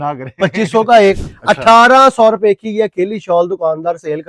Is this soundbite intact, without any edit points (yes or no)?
no